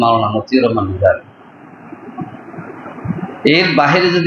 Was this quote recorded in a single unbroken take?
yes; 0 cuts

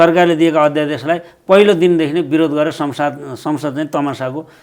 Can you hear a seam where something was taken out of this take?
no; 0 cuts

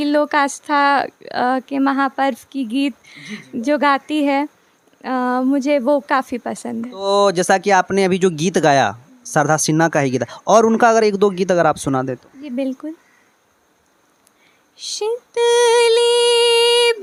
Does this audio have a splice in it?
no; 0 cuts

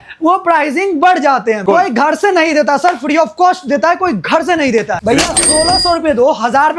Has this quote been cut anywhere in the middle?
yes; 2 cuts; at 1.6 s, 5.0 s

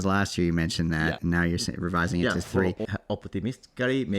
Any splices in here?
yes; 2 cuts; at 1.2 s, 2.9 s

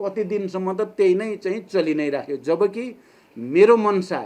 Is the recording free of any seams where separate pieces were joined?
yes; 0 cuts

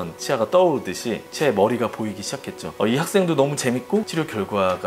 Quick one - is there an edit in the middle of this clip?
no; 0 cuts

